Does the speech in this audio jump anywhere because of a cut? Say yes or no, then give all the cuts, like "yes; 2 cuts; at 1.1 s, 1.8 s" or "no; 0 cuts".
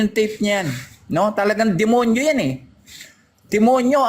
no; 0 cuts